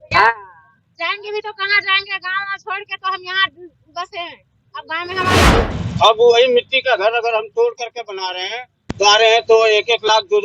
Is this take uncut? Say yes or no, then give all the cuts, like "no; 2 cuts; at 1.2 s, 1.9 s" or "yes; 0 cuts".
no; 1 cut; at 5.4 s